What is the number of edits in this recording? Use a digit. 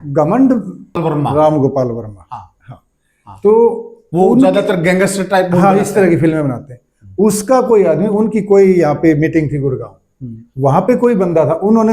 1